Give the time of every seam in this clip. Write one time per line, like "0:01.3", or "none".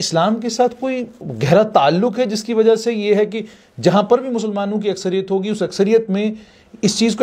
none